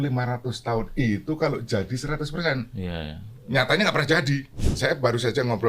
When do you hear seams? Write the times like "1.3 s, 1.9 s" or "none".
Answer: 4.5 s

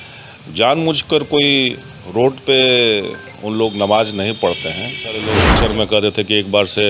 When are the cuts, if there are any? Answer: 5.6 s

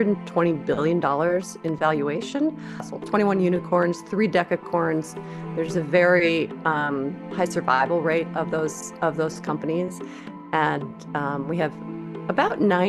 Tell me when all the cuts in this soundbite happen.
2.9 s

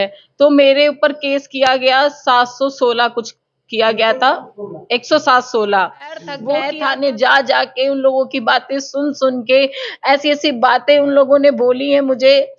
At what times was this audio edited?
6.4 s

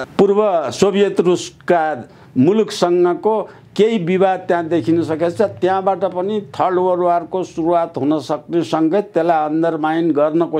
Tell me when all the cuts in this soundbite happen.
none

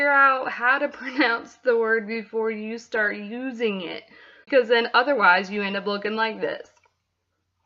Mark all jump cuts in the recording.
4.4 s

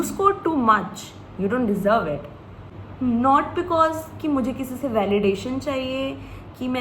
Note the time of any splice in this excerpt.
2.6 s

